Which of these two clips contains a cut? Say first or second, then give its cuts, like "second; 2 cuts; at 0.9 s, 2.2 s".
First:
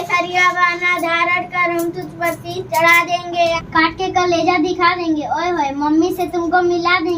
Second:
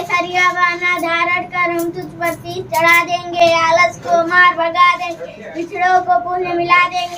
first; 1 cut; at 3.3 s